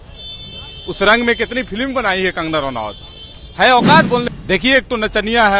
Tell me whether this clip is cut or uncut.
cut